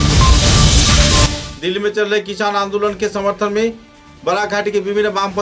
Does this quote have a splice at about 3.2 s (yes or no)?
no